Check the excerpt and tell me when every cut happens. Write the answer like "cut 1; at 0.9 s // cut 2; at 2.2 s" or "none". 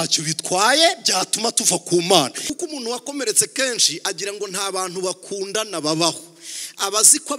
cut 1; at 2.5 s